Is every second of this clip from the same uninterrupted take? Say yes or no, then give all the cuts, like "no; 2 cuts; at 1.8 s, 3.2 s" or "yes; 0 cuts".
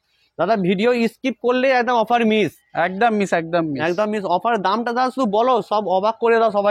yes; 0 cuts